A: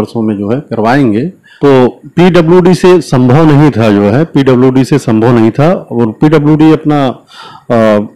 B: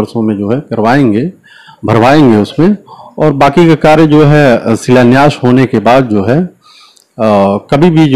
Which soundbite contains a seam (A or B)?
A